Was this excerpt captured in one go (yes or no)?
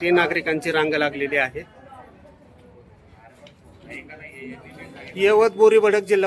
no